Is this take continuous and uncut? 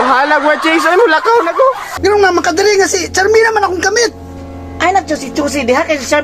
no; 1 cut; at 1.9 s

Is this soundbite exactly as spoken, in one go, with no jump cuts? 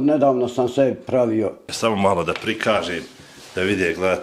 no; 1 cut; at 1.6 s

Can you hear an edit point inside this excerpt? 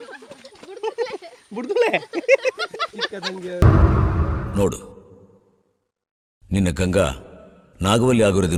no; 0 cuts

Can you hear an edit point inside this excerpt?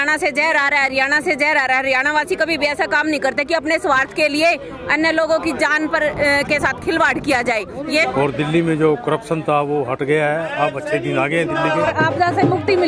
yes; 2 cuts; at 8.1 s, 11.9 s

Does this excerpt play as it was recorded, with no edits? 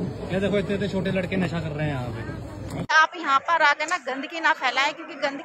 no; 1 cut; at 2.9 s

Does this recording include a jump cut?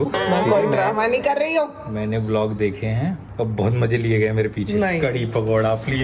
no; 0 cuts

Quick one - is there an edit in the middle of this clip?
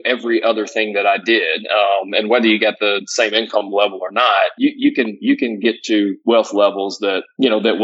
no; 0 cuts

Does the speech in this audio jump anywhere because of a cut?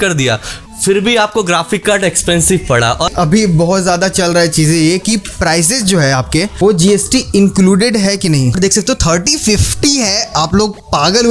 yes; 2 cuts; at 3.1 s, 8.6 s

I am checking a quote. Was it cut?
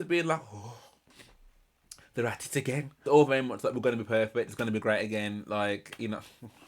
yes; 1 cut; at 2.9 s

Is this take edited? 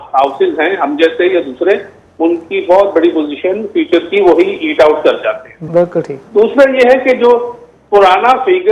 yes; 1 cut; at 5.5 s

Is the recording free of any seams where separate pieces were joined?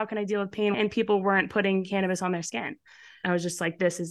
no; 2 cuts; at 0.7 s, 3.2 s

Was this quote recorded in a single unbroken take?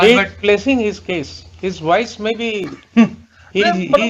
yes; 0 cuts

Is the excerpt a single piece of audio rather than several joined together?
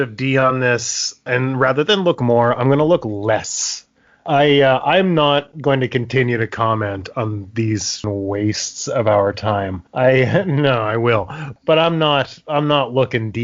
no; 3 cuts; at 1.3 s, 8.0 s, 11.5 s

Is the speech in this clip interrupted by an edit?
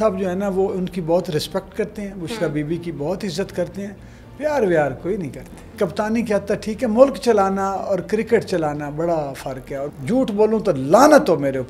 yes; 2 cuts; at 5.7 s, 9.9 s

